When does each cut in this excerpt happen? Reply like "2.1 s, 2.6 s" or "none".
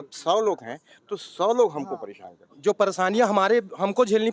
2.4 s